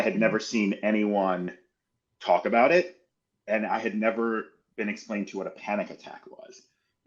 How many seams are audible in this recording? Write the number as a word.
zero